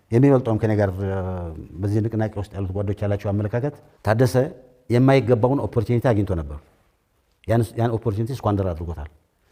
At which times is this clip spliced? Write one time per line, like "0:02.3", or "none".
none